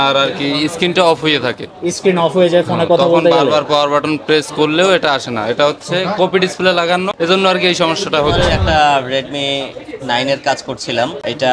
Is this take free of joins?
no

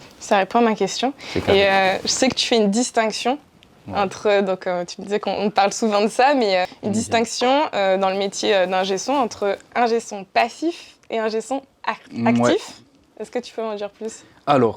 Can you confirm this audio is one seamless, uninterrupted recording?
yes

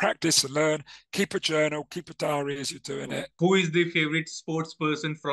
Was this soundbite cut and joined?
yes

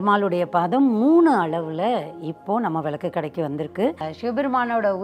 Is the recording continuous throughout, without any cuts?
no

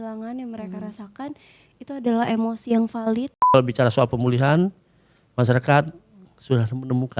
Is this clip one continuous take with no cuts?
no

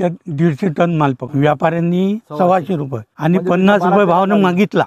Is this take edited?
yes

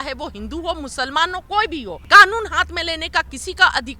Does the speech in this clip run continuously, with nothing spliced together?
no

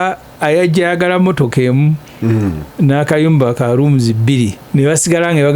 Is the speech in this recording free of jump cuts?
no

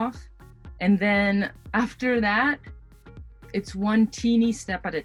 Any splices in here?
no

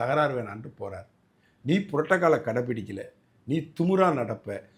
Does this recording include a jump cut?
no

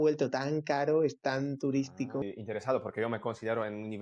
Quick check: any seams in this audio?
yes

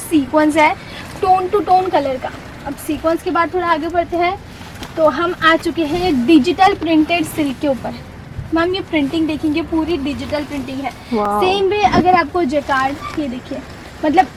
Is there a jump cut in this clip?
no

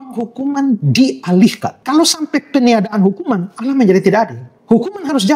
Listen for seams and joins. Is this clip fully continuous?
no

